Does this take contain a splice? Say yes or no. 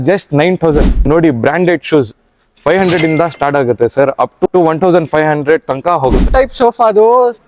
yes